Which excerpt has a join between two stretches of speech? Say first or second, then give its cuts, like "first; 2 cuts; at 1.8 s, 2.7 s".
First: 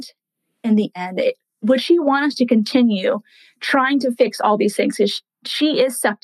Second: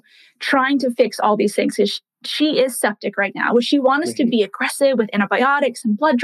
first; 1 cut; at 1.6 s